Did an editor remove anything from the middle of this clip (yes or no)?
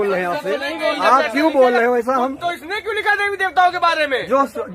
no